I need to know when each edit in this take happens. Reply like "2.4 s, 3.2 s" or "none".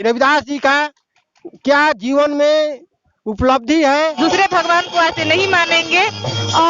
4.1 s

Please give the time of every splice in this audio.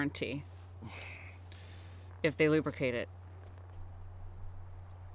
none

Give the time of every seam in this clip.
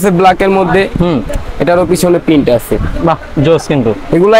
none

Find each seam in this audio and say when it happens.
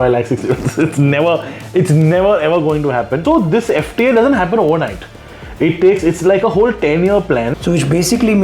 3.2 s, 7.6 s

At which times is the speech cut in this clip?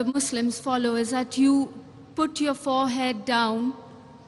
2.6 s

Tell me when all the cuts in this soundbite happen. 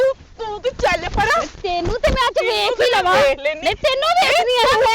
none

